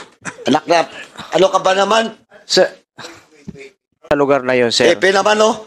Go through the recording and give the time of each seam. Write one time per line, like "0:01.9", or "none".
0:04.1